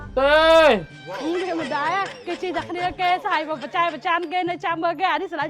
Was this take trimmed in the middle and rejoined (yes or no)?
yes